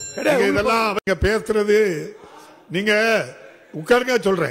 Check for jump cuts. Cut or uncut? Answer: cut